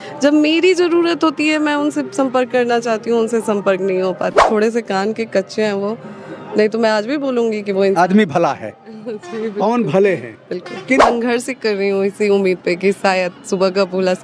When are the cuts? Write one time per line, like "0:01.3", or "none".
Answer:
0:04.4
0:11.0